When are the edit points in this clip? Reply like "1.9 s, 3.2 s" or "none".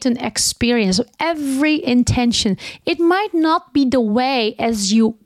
none